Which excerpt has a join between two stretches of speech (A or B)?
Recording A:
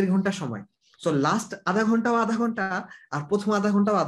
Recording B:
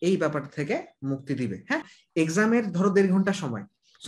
B